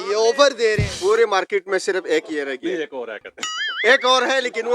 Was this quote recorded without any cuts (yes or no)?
no